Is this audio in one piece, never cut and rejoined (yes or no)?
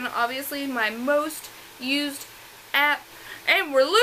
yes